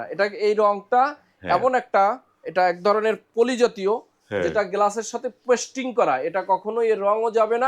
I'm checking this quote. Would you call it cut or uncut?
uncut